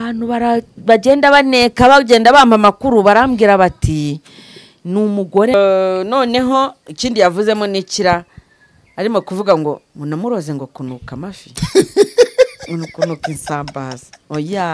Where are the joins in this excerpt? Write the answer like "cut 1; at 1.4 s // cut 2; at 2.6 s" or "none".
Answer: cut 1; at 5.5 s